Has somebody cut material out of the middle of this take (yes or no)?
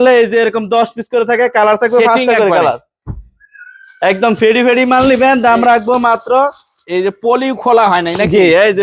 no